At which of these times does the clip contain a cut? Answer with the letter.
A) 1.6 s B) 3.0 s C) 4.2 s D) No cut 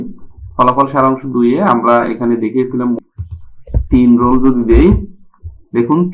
B